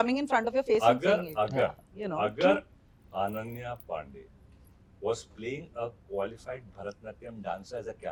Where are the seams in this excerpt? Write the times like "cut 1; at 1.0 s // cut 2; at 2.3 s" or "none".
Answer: none

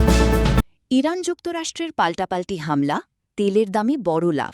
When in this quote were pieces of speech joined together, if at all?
none

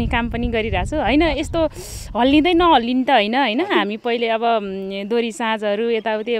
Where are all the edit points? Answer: none

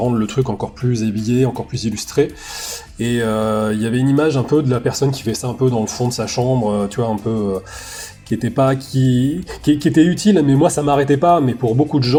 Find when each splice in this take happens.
none

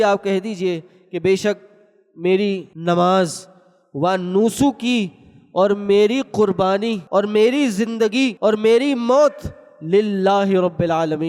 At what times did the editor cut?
cut 1; at 2.7 s // cut 2; at 7.0 s // cut 3; at 8.3 s

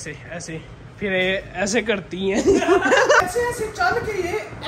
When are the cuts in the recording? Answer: cut 1; at 3.2 s

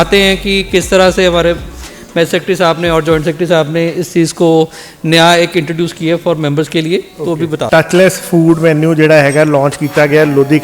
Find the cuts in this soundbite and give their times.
cut 1; at 7.6 s

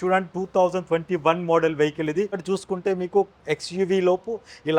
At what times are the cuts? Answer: cut 1; at 2.4 s

